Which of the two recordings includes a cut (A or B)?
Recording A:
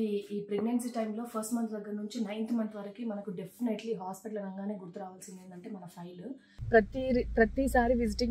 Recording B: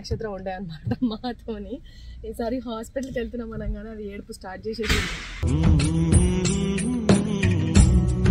A